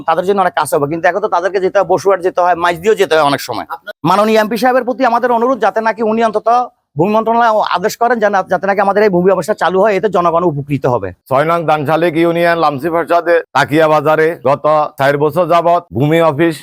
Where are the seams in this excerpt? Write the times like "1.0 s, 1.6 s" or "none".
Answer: none